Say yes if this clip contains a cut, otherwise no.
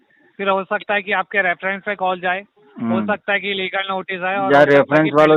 no